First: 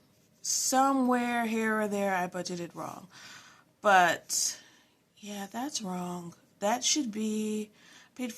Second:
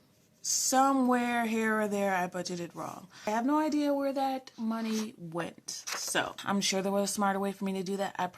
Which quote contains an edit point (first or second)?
second